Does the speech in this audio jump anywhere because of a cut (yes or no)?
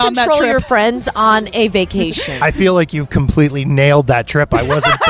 no